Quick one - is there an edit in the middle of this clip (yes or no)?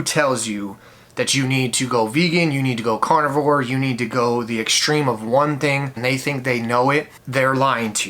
yes